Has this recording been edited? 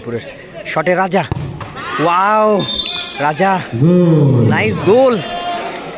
no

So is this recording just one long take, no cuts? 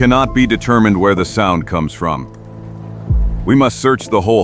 no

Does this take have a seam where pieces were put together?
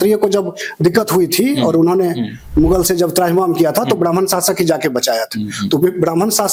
no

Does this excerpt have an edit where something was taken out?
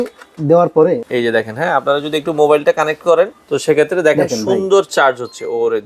yes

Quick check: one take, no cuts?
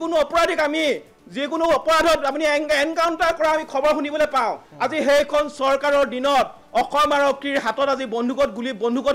yes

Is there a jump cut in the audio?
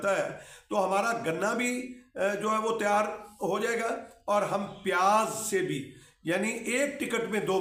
no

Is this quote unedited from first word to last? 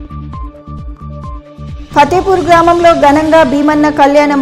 no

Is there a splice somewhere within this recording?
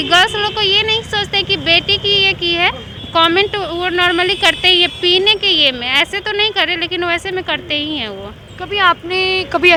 no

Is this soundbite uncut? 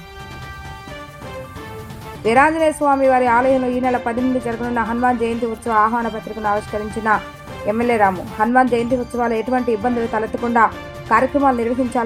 yes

